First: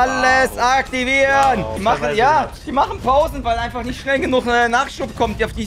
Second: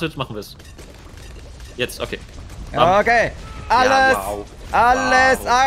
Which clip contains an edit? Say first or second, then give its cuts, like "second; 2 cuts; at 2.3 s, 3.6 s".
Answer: first; 1 cut; at 1.8 s